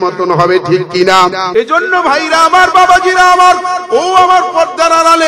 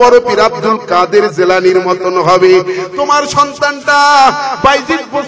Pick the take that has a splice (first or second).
first